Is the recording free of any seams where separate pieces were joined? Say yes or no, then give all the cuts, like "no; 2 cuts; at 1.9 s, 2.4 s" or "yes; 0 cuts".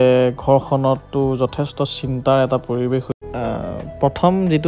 no; 1 cut; at 3.1 s